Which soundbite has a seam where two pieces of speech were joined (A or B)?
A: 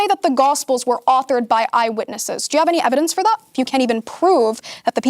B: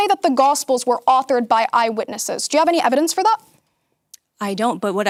A